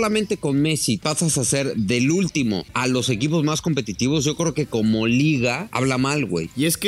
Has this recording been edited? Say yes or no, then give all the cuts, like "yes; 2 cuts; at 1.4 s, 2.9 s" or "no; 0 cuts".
yes; 3 cuts; at 1.0 s, 2.7 s, 6.1 s